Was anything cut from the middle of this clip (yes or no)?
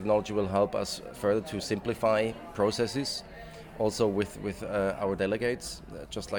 no